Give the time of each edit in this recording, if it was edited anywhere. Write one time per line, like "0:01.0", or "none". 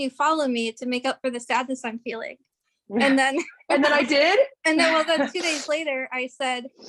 none